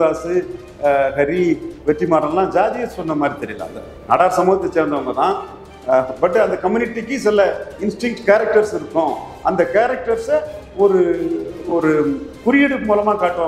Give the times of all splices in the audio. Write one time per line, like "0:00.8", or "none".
none